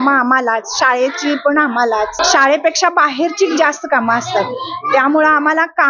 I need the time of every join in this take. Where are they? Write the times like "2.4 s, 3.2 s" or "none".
2.2 s